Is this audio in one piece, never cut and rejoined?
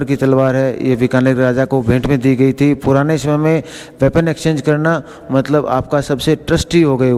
yes; 0 cuts

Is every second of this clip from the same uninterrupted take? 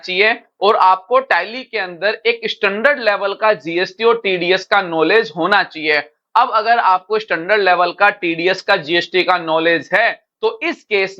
no; 1 cut; at 10.3 s

